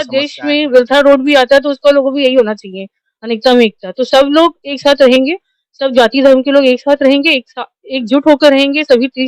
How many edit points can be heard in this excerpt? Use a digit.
0